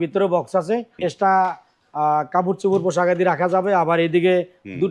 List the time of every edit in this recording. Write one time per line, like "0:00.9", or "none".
0:00.9